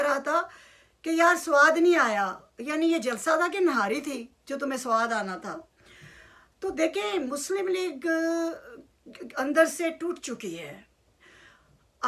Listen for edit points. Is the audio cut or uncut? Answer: uncut